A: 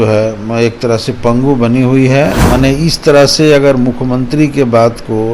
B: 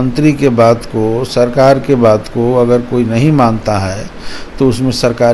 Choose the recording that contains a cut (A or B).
A